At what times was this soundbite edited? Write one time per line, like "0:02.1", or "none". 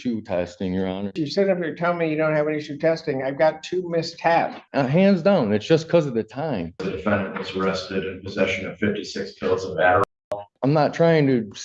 0:01.2
0:04.6
0:06.9
0:10.1

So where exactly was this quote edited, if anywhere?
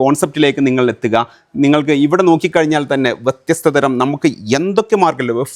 none

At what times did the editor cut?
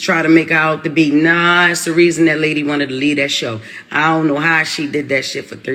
none

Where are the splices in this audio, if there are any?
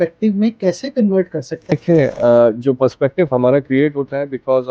0:01.7

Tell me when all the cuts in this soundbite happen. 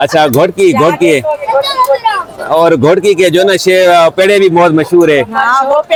none

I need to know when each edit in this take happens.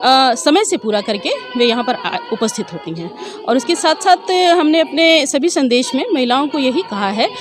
none

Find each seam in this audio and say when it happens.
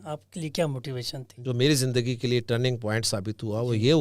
0:01.4

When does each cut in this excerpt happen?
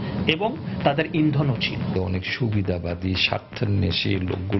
0:01.9

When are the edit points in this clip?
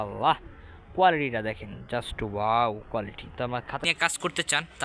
0:03.8

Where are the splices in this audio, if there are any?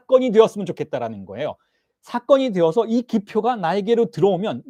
none

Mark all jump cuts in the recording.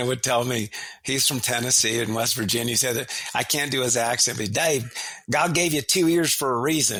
none

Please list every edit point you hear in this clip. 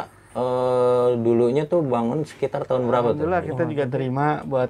0:03.5

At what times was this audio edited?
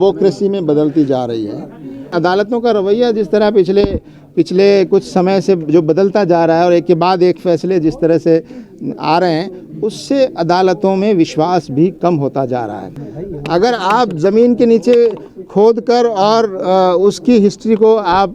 0:02.1
0:12.9

